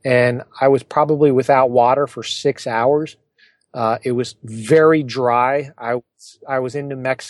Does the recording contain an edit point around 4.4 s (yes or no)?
no